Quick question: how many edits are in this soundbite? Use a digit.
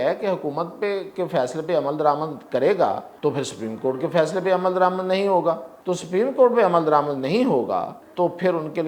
3